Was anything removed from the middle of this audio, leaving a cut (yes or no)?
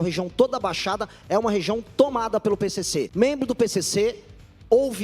yes